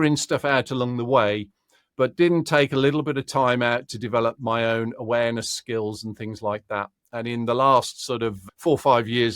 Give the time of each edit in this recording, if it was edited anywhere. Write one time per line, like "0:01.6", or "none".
0:08.4